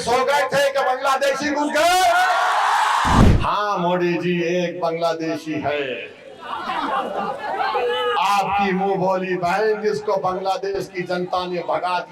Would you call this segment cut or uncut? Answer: cut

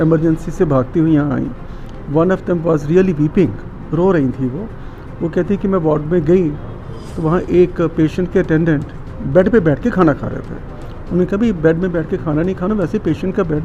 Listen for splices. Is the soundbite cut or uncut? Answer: uncut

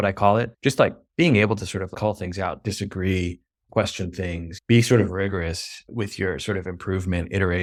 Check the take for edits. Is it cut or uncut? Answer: uncut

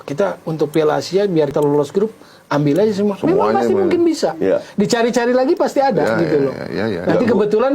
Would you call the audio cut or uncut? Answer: cut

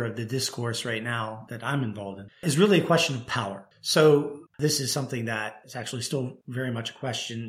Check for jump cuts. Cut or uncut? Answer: cut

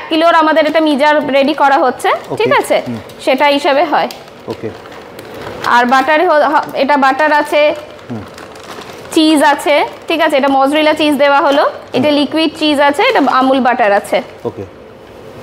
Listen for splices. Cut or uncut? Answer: uncut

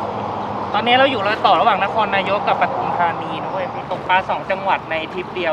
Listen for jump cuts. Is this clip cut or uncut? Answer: cut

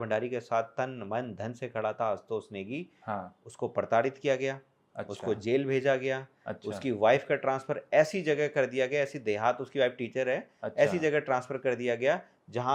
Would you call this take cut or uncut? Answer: uncut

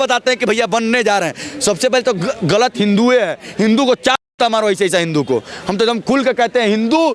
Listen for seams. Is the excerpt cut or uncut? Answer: uncut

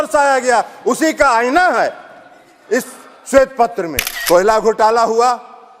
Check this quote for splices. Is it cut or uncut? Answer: cut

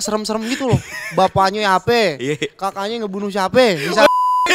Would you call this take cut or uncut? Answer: uncut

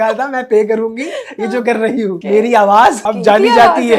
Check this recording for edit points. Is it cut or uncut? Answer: cut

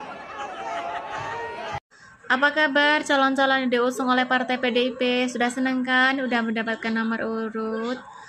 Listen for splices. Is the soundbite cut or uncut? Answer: uncut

